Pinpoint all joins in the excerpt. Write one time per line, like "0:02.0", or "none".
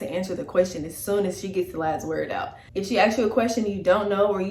0:02.6

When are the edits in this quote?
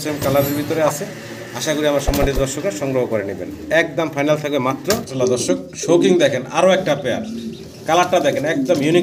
0:05.1

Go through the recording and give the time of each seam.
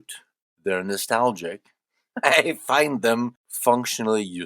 0:03.4

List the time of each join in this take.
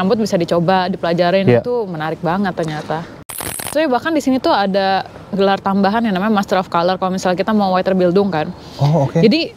0:03.3

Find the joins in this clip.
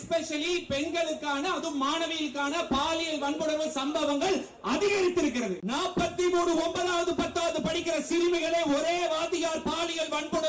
0:05.6

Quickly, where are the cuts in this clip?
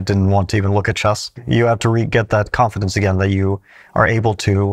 0:01.3

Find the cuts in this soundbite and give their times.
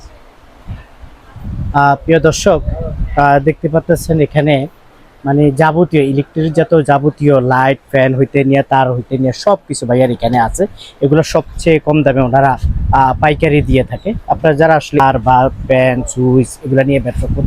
0:15.0

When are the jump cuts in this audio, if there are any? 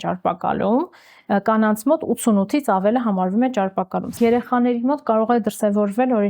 0:04.2

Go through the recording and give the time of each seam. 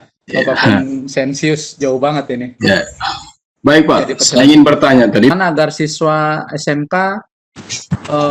0:05.3

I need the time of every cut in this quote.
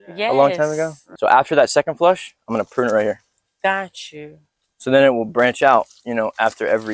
0:01.0

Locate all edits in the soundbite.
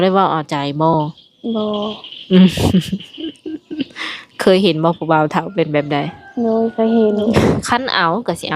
0:07.6

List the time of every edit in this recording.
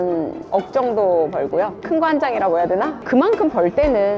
0:03.0

